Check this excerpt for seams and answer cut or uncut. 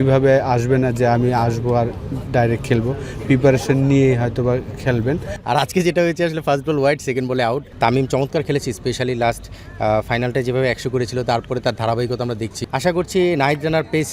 cut